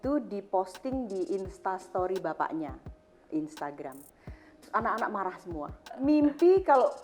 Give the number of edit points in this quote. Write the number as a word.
one